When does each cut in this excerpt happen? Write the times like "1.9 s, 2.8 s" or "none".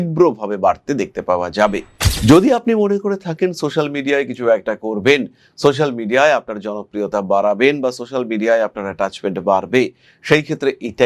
1.9 s